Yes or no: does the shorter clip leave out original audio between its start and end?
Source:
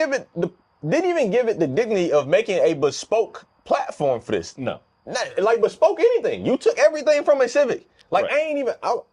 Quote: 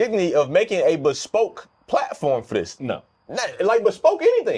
no